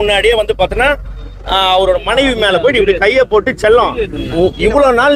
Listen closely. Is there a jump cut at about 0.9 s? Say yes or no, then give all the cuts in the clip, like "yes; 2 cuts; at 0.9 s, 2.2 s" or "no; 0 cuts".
no; 0 cuts